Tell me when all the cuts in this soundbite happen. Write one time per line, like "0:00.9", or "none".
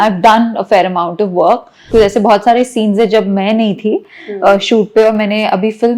0:01.9